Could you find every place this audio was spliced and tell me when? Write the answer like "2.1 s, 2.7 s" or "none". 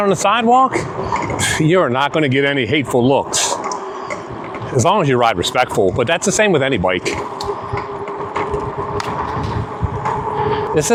none